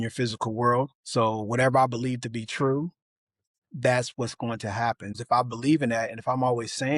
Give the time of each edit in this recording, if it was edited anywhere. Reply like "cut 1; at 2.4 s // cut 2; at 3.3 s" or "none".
cut 1; at 1.0 s // cut 2; at 5.2 s